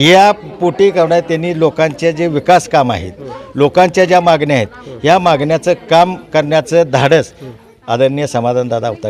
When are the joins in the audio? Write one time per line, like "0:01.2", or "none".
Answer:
none